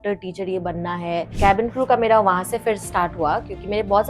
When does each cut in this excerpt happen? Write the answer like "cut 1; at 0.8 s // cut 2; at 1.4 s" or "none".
cut 1; at 1.4 s